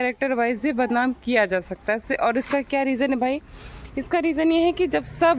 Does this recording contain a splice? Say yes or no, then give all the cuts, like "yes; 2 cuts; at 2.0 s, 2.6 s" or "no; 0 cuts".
no; 0 cuts